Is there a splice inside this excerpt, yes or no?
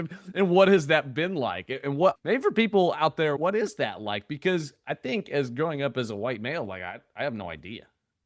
yes